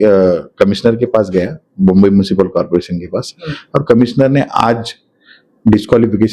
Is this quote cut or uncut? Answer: uncut